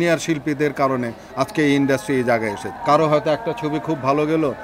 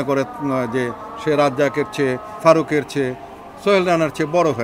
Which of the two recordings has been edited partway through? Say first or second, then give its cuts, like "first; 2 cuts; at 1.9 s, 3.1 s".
first; 1 cut; at 2.7 s